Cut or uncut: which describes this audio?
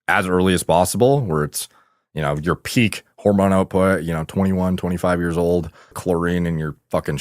cut